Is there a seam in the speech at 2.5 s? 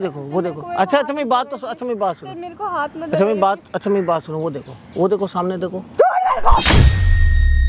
no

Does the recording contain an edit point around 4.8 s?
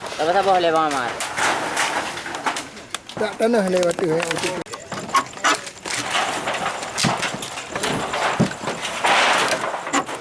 yes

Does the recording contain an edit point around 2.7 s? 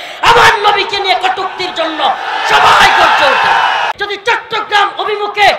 no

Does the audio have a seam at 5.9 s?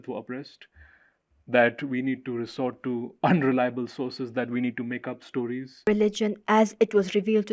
yes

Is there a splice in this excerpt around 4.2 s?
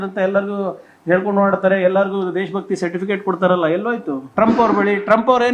yes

